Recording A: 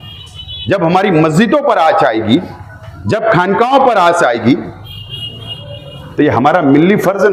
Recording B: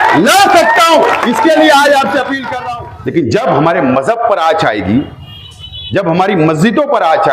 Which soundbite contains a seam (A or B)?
B